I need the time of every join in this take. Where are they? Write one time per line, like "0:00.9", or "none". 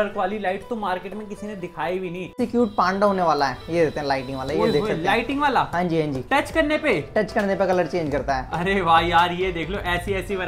0:02.4